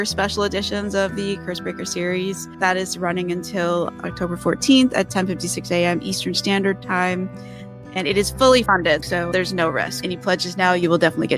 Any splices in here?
no; 0 cuts

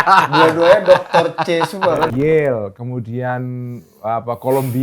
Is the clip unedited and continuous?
no; 1 cut; at 2.1 s

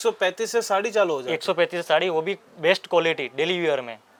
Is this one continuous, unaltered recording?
yes; 0 cuts

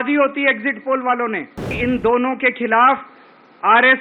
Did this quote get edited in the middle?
yes; 1 cut; at 1.7 s

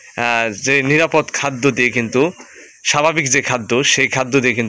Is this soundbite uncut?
yes; 0 cuts

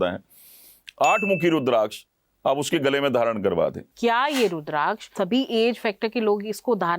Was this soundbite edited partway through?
yes; 2 cuts; at 3.9 s, 5.1 s

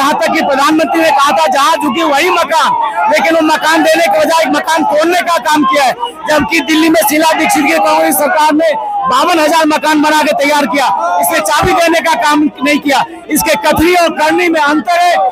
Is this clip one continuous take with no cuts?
yes; 0 cuts

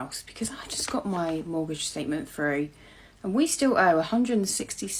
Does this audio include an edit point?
no; 0 cuts

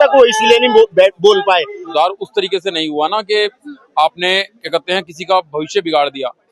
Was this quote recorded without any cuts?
no; 1 cut; at 1.8 s

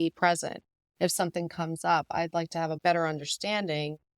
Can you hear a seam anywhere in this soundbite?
yes; 1 cut; at 2.8 s

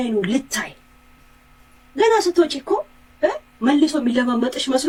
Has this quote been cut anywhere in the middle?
no; 0 cuts

